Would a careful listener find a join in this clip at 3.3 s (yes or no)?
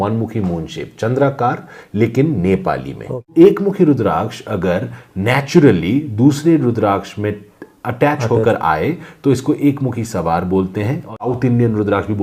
yes